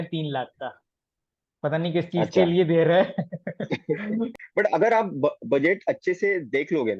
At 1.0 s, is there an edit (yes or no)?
no